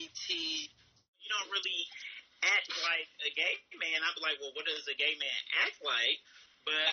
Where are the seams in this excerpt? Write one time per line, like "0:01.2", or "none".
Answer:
0:01.2

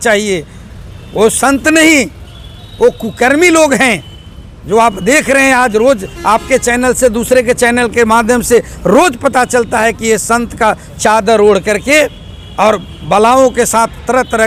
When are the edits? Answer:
none

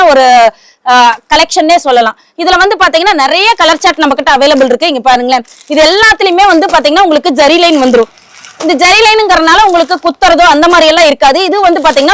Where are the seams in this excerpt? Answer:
none

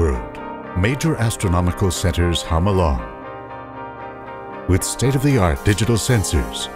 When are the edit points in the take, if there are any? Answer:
0:05.6

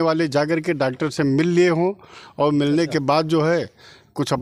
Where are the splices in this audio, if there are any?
none

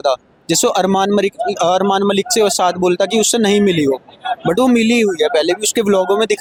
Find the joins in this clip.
none

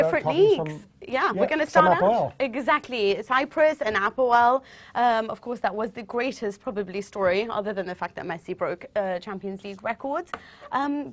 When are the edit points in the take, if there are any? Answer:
0:04.8

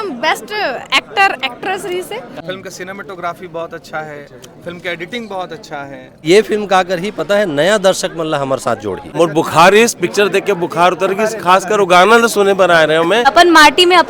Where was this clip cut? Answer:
0:02.3
0:06.2
0:09.0
0:13.3

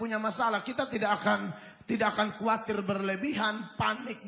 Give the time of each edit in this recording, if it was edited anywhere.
none

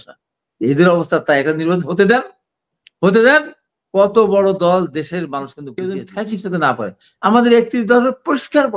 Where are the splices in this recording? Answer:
0:05.6

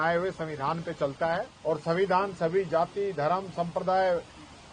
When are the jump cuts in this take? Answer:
0:01.5

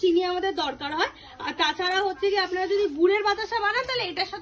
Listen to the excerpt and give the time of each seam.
none

